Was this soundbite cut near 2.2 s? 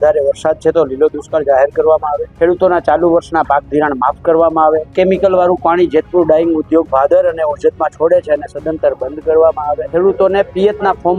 yes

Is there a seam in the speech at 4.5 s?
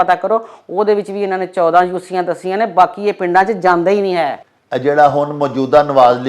yes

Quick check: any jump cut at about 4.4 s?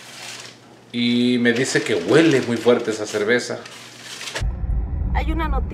yes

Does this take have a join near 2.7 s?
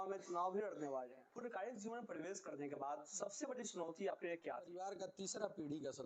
no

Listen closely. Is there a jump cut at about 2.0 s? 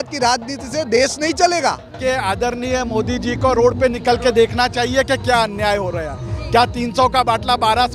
yes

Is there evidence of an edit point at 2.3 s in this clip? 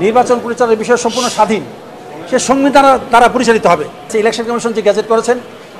no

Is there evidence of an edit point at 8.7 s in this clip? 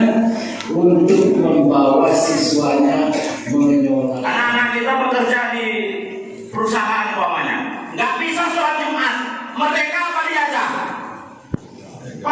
no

